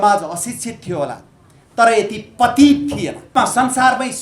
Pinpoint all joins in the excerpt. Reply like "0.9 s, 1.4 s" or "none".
3.3 s